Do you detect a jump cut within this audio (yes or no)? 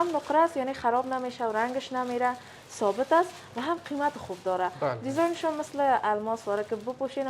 no